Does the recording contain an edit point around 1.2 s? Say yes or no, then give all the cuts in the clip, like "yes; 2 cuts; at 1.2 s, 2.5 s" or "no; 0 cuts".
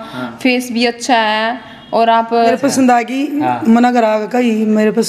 no; 1 cut; at 2.5 s